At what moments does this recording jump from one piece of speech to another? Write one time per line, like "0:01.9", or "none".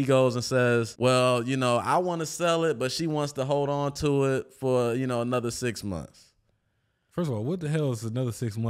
0:00.9